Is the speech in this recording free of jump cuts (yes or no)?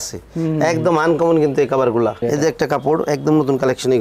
no